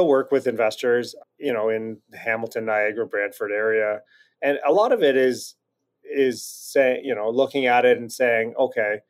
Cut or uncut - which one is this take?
cut